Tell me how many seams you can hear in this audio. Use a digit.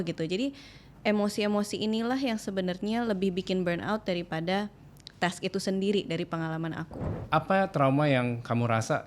1